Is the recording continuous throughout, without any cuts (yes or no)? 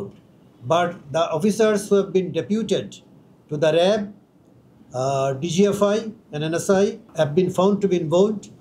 no